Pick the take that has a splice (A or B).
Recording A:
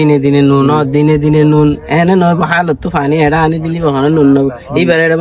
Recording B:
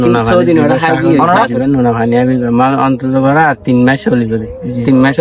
B